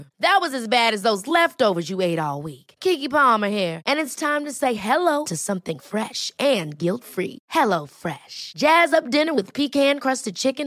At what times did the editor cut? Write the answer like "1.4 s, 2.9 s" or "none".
none